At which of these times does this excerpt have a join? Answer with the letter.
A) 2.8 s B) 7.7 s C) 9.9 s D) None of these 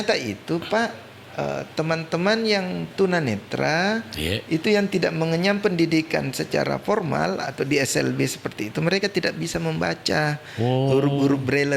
D